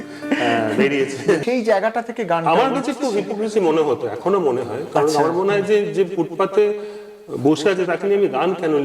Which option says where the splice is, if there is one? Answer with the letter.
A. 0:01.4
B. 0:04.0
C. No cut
A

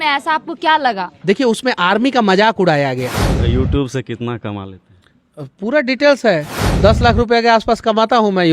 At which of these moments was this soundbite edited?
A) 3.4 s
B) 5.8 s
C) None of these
A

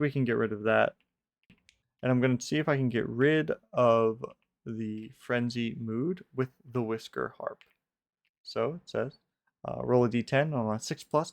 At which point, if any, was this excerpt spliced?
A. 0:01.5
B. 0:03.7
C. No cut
A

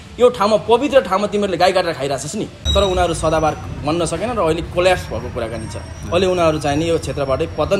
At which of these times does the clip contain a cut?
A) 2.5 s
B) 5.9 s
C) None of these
A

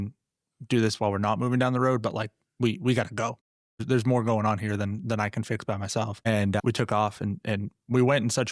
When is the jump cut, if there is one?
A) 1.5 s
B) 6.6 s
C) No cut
B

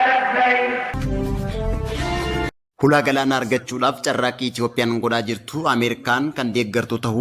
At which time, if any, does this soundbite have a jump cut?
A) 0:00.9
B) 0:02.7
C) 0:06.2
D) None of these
A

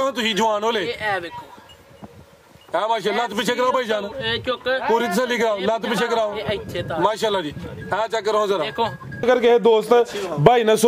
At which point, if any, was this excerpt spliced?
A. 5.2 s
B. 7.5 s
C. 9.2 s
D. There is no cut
C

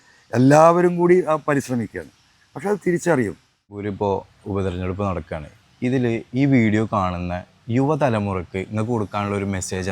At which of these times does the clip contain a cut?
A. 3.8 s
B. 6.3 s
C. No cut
A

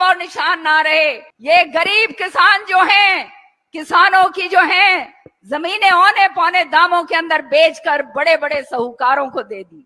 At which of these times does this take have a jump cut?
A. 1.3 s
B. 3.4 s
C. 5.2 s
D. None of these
A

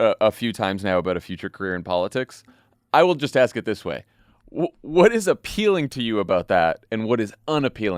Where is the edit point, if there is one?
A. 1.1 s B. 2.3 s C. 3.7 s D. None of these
D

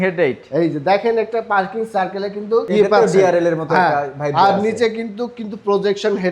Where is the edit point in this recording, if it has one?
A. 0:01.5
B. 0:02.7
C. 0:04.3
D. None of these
B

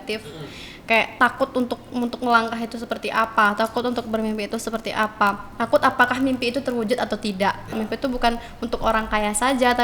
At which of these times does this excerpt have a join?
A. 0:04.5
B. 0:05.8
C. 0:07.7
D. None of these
C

